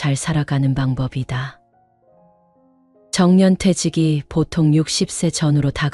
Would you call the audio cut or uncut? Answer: cut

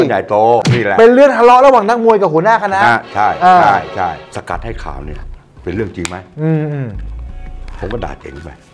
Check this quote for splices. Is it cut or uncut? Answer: cut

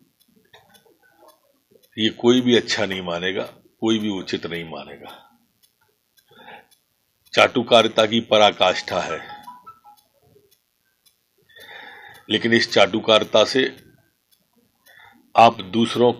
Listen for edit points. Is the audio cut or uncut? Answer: uncut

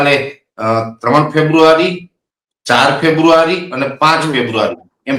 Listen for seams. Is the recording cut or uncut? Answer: uncut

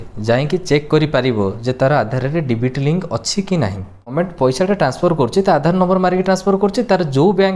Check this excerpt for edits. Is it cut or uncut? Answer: cut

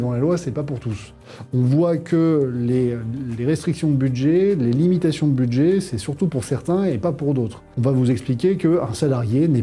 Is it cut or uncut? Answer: cut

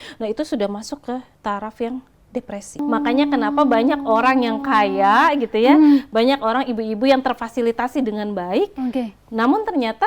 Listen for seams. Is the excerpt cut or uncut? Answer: cut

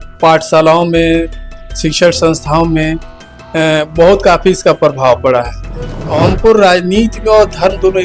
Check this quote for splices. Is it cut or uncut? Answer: cut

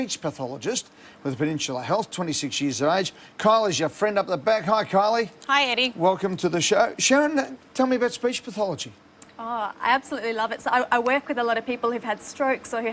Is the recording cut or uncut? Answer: uncut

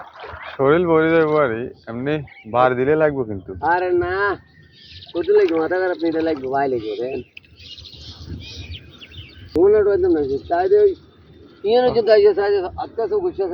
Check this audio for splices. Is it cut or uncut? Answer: cut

